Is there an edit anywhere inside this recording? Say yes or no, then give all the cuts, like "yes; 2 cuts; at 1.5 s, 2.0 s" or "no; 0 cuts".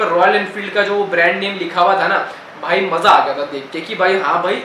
no; 0 cuts